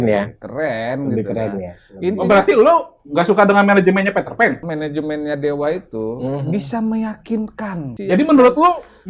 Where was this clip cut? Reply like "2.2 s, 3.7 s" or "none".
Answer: 4.6 s, 7.9 s